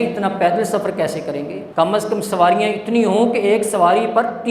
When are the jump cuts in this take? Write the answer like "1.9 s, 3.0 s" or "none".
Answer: 1.6 s

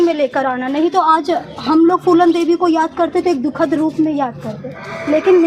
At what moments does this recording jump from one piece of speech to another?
none

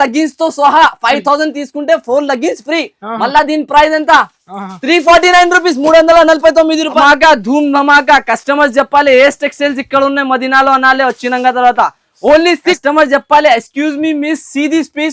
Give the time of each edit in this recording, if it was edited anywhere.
7.0 s, 12.8 s

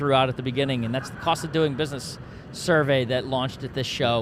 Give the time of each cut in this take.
none

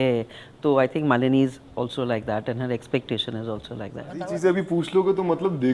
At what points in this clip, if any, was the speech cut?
4.2 s

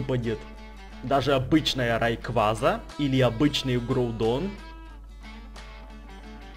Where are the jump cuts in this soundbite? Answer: 2.9 s

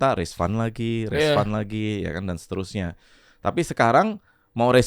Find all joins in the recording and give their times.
none

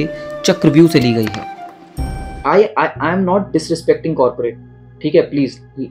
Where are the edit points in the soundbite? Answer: 2.3 s

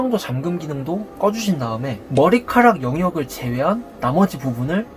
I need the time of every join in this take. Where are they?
none

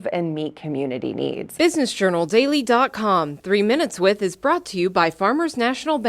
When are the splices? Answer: 1.5 s

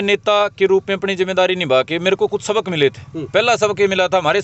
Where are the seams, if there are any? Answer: none

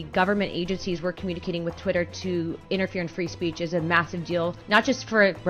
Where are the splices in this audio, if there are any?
4.6 s

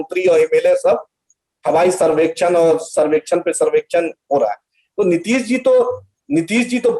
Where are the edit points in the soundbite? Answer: none

